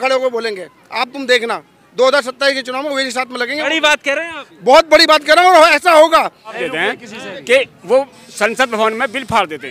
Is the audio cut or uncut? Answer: cut